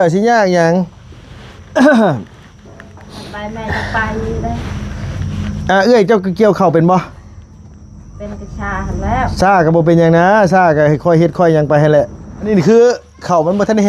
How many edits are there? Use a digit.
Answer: 1